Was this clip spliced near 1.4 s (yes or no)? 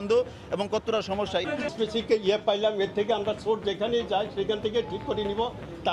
yes